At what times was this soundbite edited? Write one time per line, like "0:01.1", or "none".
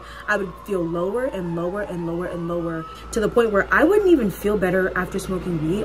0:03.0